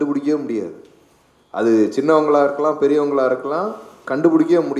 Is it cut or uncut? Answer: uncut